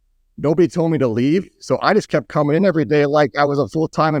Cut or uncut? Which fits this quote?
uncut